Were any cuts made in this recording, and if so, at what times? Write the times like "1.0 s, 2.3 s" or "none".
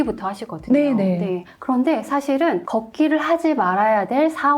2.6 s